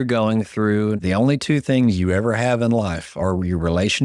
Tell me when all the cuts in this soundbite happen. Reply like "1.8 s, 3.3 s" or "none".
1.0 s